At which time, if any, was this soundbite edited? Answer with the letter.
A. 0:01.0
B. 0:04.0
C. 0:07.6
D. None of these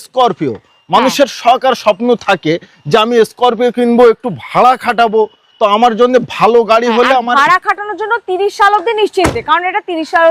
D